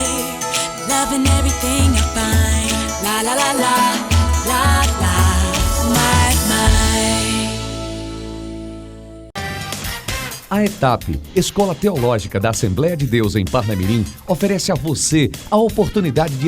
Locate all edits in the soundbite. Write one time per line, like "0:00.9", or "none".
0:09.3